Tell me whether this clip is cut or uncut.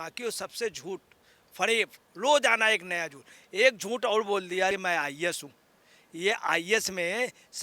cut